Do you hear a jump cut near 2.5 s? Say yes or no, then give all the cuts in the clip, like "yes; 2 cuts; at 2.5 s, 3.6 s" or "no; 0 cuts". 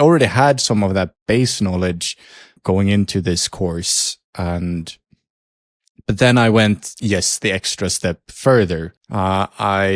yes; 2 cuts; at 2.5 s, 9.0 s